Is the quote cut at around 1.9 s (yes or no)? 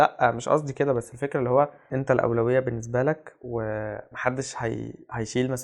yes